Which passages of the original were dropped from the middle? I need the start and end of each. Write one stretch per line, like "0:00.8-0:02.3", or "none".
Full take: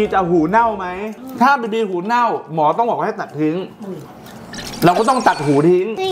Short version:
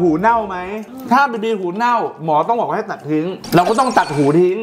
0:03.7-0:04.7